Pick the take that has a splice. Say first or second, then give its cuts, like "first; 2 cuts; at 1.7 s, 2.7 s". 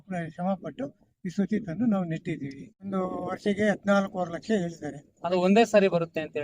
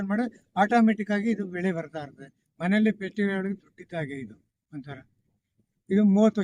first; 1 cut; at 2.9 s